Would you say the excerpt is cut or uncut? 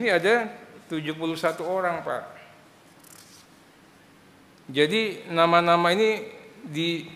uncut